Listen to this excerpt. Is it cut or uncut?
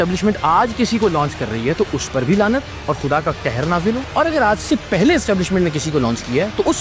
cut